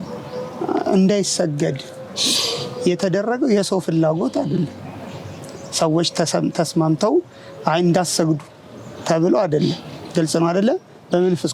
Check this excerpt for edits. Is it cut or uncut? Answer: uncut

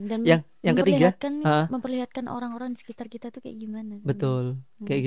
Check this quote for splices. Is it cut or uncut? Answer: uncut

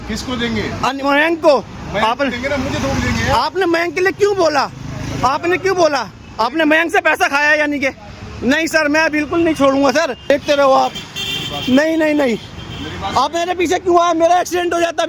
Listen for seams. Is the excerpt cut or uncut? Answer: cut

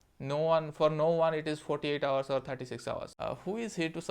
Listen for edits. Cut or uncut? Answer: cut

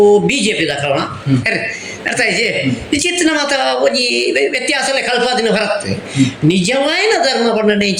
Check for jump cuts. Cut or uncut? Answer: uncut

